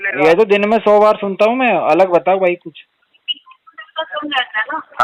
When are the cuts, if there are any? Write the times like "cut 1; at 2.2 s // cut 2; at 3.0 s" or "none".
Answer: none